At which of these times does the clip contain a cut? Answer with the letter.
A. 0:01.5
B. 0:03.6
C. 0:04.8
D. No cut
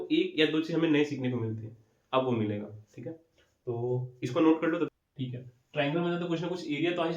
C